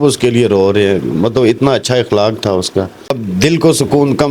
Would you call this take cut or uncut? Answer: cut